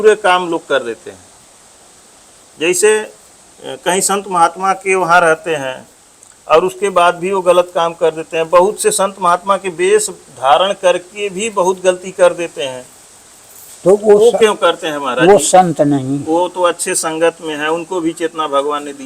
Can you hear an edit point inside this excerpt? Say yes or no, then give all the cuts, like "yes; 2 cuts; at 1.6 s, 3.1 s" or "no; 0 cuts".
no; 0 cuts